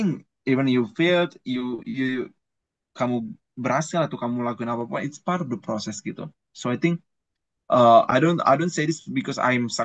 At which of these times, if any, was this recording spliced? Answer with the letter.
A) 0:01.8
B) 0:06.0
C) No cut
C